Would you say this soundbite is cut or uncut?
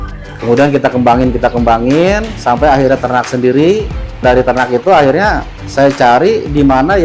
cut